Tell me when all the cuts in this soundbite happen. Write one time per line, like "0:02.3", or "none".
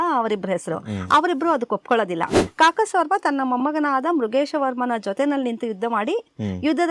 0:02.4